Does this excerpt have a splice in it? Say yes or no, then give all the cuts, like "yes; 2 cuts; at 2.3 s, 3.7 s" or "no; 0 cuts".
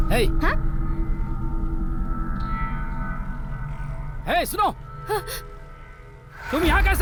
no; 0 cuts